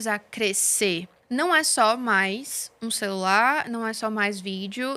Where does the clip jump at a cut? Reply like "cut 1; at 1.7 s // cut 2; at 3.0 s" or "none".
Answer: cut 1; at 1.1 s